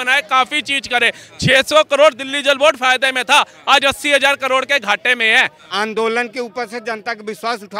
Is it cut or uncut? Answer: cut